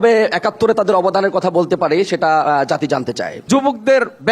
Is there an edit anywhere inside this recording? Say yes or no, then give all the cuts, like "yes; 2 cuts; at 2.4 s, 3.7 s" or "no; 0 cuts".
yes; 1 cut; at 3.3 s